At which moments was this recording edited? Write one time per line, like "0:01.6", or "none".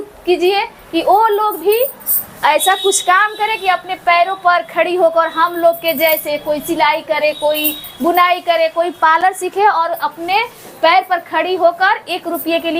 none